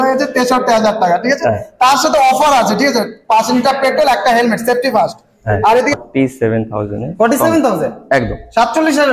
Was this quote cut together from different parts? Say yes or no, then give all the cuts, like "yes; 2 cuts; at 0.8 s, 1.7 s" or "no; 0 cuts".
yes; 1 cut; at 5.9 s